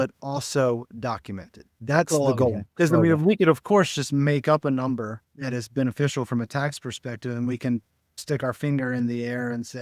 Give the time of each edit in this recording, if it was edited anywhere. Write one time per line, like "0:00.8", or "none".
none